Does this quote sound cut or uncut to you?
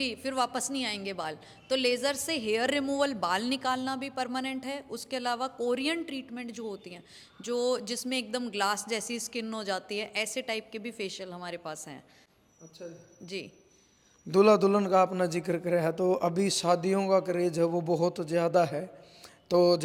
uncut